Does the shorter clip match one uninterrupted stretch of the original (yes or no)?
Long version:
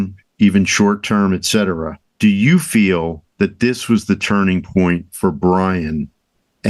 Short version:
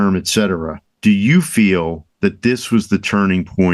yes